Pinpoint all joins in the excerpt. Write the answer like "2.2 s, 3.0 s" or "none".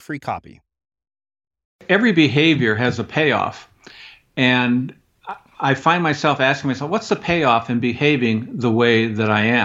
1.8 s